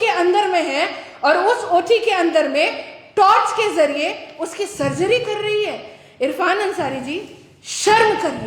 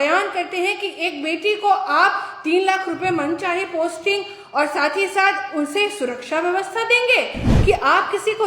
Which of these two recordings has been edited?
second; 1 cut; at 7.4 s

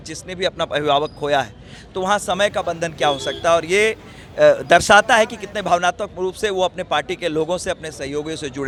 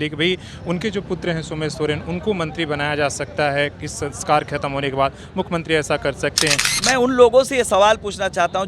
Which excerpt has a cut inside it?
second; 1 cut; at 6.7 s

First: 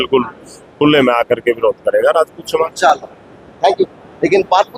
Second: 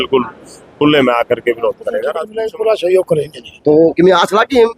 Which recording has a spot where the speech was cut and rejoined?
second; 1 cut; at 2.2 s

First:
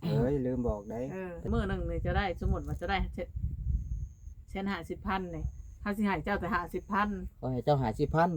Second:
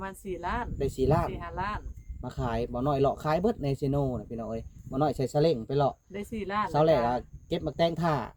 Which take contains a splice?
first; 1 cut; at 1.5 s

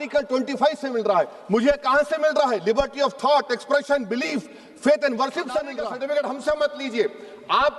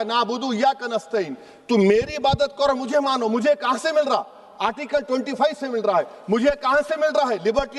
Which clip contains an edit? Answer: first; 1 cut; at 5.8 s

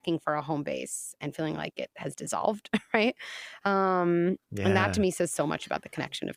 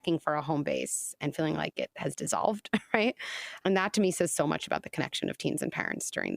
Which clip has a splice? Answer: second; 1 cut; at 3.5 s

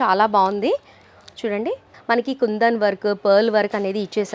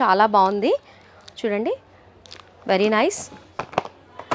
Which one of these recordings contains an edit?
first; 1 cut; at 1.9 s

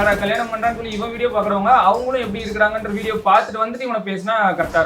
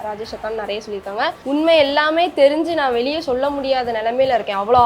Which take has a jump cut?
second; 1 cut; at 1.4 s

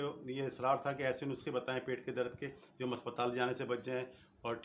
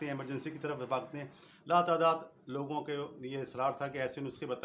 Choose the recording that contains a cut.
second; 1 cut; at 1.4 s

